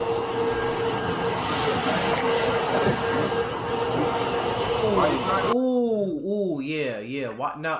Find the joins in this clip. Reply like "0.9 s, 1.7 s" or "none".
none